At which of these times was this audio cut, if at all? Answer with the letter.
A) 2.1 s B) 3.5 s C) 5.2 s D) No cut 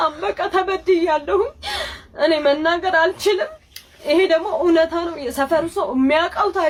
D